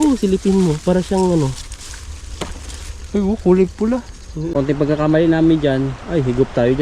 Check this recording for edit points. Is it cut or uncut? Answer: cut